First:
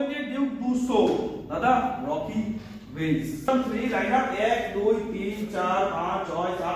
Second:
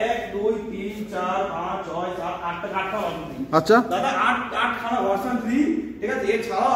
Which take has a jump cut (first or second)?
first